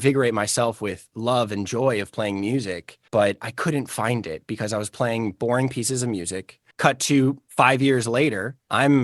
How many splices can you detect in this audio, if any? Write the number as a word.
one